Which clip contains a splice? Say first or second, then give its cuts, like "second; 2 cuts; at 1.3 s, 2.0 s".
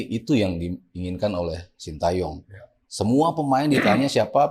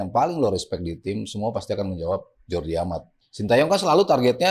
second; 1 cut; at 3.2 s